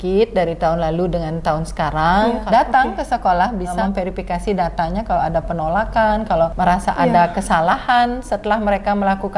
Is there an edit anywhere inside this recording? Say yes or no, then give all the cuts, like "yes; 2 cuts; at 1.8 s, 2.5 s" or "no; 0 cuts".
yes; 3 cuts; at 2.4 s, 3.8 s, 6.5 s